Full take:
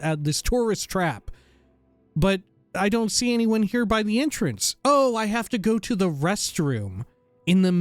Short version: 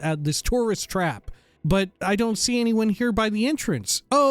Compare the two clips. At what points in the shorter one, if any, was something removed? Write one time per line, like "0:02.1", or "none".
0:01.8

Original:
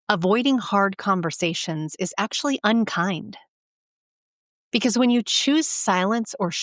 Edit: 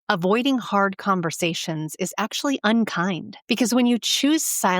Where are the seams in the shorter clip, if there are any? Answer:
0:03.3

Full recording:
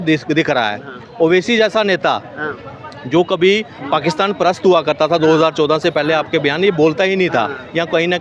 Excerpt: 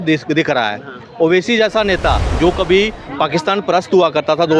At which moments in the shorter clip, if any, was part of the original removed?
0:02.3

